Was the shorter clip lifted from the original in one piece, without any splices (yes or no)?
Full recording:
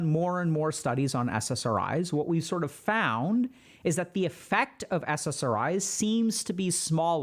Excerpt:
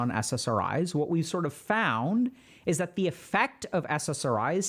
yes